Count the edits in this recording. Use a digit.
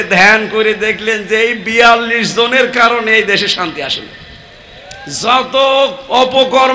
0